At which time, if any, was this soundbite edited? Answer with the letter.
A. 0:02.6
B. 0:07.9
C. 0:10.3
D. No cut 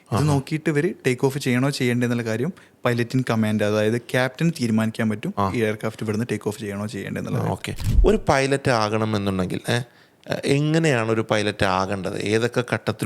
B